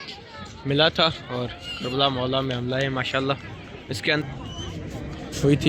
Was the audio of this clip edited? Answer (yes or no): yes